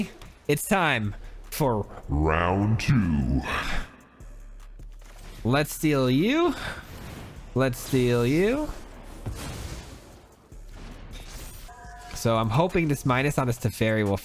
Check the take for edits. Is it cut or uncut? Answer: cut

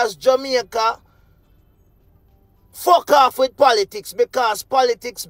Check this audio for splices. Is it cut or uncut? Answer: uncut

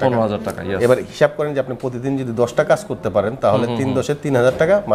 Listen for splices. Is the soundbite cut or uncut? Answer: uncut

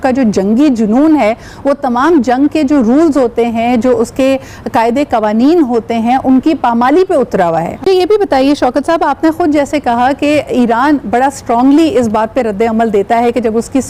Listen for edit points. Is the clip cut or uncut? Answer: uncut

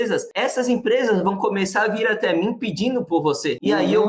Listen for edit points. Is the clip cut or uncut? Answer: uncut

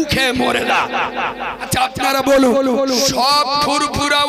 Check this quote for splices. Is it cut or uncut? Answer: cut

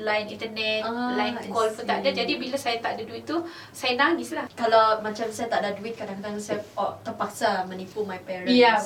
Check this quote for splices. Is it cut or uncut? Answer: cut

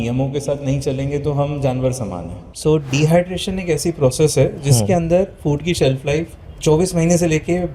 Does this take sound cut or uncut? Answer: cut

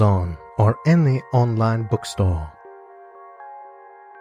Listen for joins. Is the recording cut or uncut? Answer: uncut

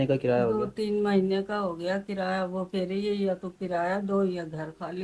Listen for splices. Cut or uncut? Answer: uncut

